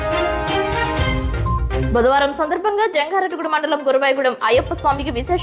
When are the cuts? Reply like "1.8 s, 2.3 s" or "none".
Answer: 1.9 s